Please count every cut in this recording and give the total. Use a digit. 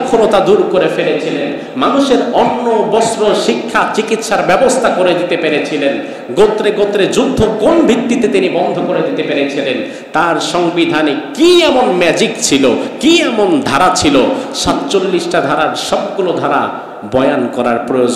0